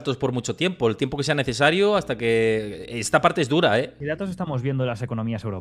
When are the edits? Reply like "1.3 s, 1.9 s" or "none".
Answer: 4.0 s